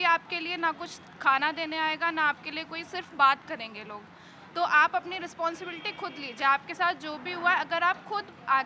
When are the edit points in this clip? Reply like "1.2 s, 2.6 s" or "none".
none